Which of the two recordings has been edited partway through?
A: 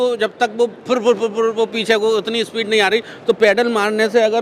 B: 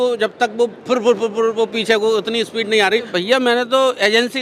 B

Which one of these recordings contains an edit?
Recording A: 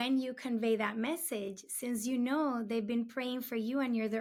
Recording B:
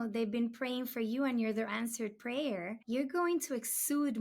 B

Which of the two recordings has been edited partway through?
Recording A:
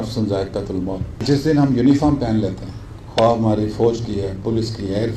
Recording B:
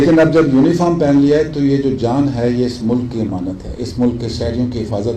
A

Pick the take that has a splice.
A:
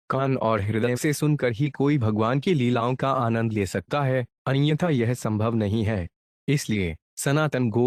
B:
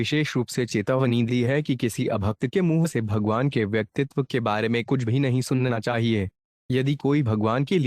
B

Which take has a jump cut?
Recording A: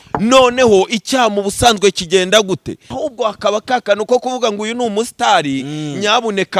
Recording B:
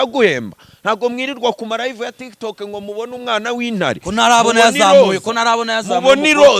A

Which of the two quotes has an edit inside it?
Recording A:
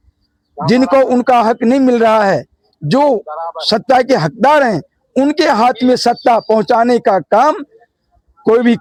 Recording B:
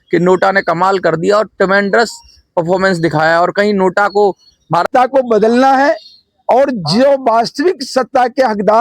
B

